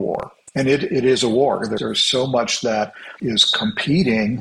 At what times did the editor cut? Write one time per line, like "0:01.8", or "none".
0:01.8
0:03.0